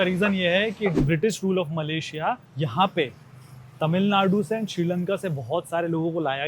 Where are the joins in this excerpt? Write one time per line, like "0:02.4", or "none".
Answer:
0:02.5